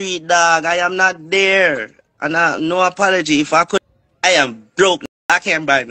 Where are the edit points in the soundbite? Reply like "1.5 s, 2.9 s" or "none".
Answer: 3.8 s